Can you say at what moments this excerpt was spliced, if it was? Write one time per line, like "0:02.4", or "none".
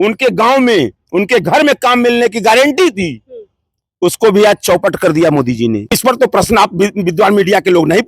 0:05.9